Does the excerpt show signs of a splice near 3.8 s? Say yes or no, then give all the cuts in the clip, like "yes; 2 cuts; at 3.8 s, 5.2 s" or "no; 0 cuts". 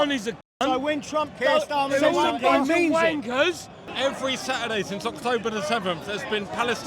yes; 1 cut; at 3.8 s